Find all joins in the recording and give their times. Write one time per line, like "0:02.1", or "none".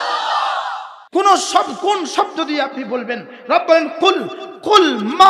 0:00.9

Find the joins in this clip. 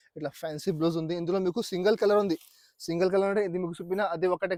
none

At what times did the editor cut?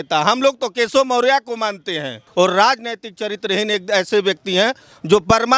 0:02.2

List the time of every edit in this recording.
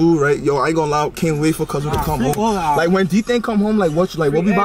none

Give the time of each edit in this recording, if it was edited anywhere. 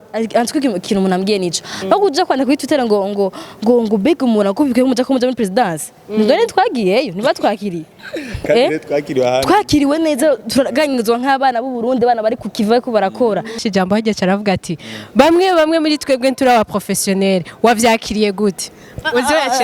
0:13.6

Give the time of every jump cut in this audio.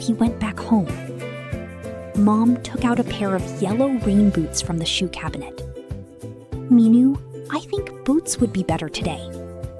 none

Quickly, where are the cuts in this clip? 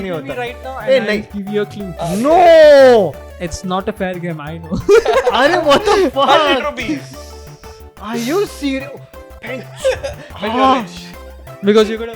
0:01.9

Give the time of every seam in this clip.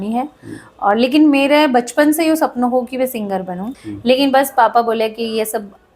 0:03.7

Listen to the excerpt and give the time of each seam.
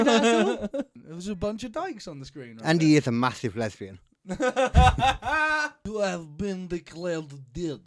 0:00.9
0:05.8

